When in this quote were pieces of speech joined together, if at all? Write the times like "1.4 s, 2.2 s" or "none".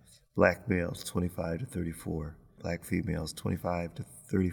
2.6 s